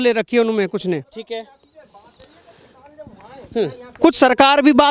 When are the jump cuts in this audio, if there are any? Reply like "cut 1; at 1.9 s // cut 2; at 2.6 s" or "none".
none